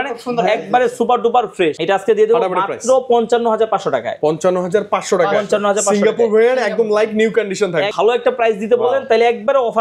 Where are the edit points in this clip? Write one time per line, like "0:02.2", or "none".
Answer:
0:01.8
0:07.9